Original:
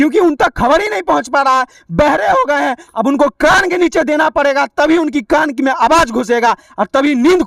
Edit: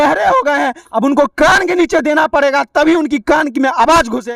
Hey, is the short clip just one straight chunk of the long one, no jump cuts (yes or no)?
yes